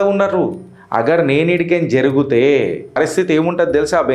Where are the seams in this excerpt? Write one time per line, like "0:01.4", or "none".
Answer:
0:02.9